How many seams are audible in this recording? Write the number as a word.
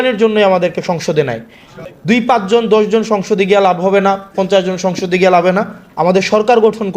one